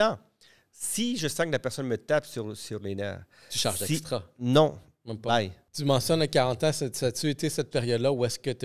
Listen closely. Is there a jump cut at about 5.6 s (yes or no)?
yes